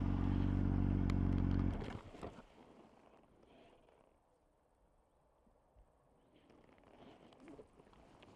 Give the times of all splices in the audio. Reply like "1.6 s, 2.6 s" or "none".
none